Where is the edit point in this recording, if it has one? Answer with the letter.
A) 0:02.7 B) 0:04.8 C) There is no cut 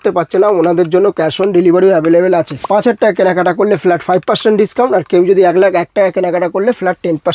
A